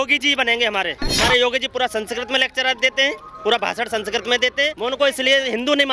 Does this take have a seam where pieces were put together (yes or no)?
yes